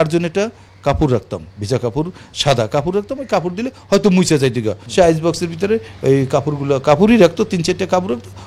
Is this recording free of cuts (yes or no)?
no